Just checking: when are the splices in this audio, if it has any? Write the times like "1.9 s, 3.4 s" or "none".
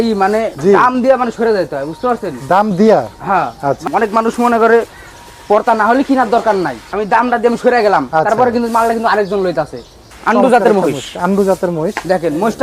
3.8 s, 6.8 s, 10.1 s